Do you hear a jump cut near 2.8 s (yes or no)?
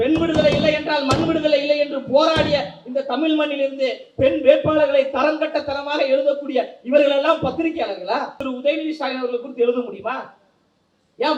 no